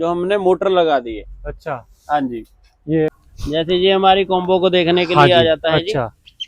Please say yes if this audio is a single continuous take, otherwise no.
no